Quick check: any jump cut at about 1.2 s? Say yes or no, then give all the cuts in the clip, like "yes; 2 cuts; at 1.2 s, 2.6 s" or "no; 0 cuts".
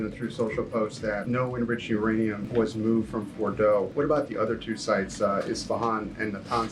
yes; 3 cuts; at 1.2 s, 2.4 s, 3.9 s